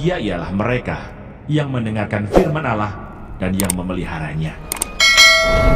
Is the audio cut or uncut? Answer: uncut